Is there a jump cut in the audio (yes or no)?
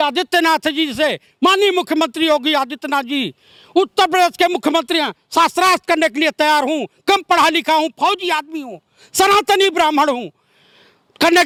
no